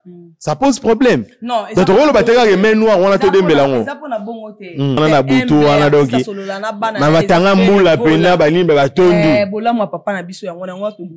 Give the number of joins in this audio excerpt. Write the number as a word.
one